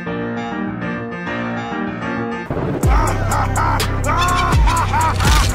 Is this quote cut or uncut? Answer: uncut